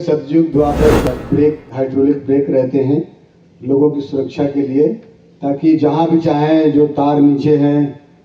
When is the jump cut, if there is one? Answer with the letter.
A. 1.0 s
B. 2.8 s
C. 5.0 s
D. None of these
A